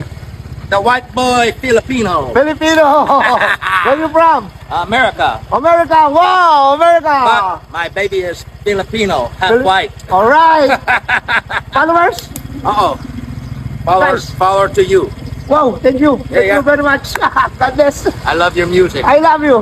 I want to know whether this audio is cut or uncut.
uncut